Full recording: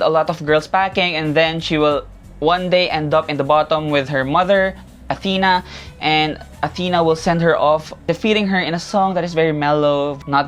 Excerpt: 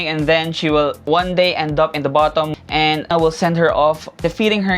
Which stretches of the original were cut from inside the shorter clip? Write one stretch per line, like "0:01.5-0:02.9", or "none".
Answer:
0:02.1-0:02.3
0:03.9-0:06.4

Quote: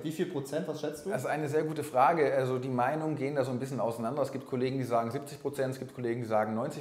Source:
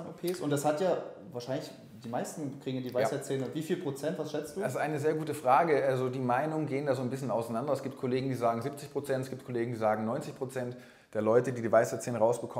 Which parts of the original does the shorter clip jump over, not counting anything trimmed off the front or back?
none

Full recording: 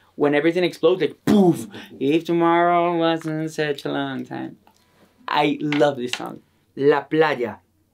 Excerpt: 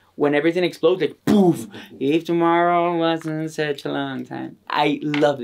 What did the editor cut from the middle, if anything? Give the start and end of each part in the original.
0:04.6-0:05.1

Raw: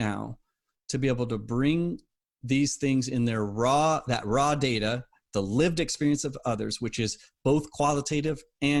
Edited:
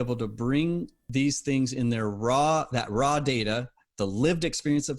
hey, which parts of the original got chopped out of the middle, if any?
0:02.1-0:02.3

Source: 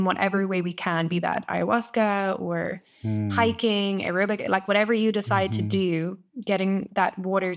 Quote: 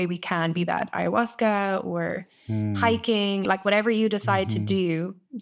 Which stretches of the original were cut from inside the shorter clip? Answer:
0:04.0-0:04.5

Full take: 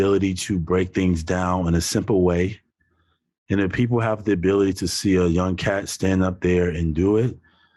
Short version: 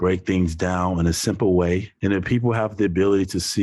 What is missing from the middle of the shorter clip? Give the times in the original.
0:02.6-0:03.4

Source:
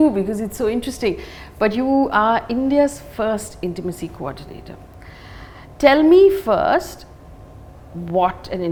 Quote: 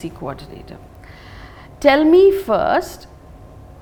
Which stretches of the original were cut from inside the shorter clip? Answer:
none

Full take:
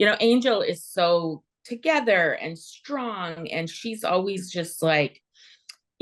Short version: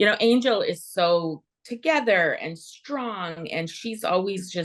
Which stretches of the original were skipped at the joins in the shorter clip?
none

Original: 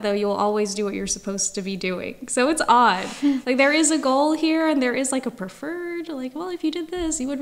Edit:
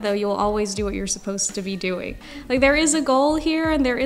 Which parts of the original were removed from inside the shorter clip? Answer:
0:02.4-0:03.3

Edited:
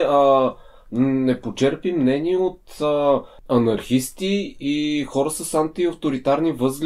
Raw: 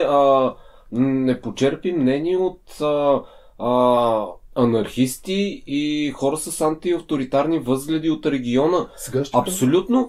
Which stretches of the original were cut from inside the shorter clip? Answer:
0:03.3-0:04.4

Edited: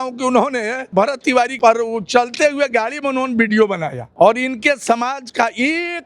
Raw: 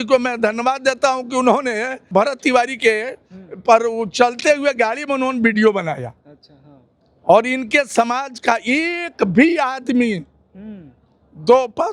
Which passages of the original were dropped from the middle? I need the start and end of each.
0:02.1-0:03.0
0:06.0-0:07.1

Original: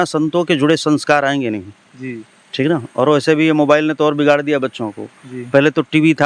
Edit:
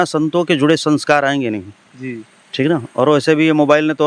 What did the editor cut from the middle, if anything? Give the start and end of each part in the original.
none

